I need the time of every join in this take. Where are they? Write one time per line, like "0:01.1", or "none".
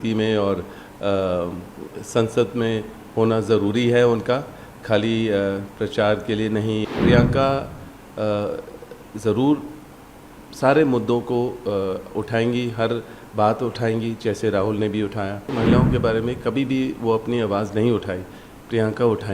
0:06.8
0:15.5